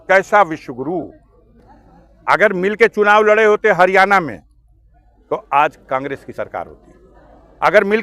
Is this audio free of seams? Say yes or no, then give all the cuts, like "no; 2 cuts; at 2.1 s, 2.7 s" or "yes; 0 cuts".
no; 1 cut; at 1.6 s